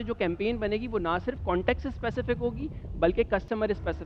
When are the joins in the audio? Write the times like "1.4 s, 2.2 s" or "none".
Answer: none